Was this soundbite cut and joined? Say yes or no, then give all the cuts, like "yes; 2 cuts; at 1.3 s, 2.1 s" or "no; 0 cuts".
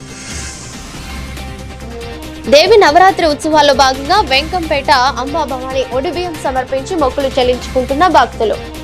yes; 2 cuts; at 1.0 s, 2.4 s